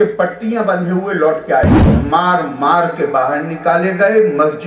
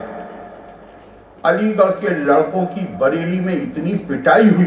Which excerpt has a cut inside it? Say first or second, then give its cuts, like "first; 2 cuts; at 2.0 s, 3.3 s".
first; 1 cut; at 1.8 s